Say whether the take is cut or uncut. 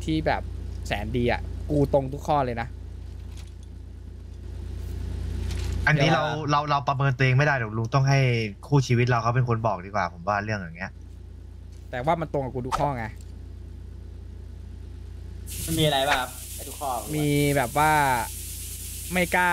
uncut